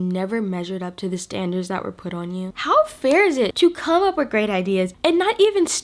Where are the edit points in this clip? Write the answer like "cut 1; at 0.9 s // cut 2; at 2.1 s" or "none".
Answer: cut 1; at 2.6 s // cut 2; at 3.5 s